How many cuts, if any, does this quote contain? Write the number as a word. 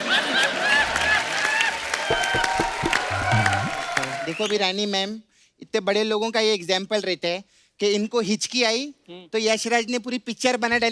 one